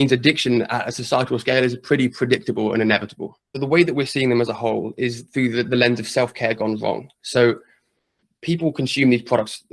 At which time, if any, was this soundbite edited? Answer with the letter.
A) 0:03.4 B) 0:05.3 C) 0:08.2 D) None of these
A